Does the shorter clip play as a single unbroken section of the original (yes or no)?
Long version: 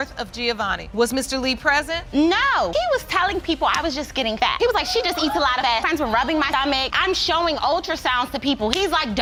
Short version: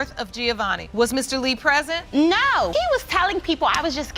yes